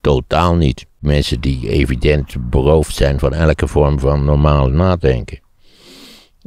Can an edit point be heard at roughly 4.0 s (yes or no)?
no